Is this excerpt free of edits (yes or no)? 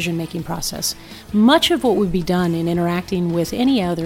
yes